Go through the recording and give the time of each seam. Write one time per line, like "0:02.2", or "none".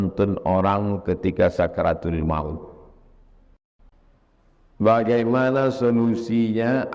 0:03.9